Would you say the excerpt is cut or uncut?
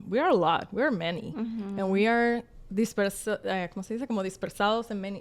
uncut